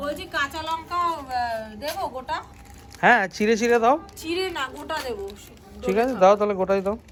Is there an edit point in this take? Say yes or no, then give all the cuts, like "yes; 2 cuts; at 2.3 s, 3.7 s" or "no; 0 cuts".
no; 0 cuts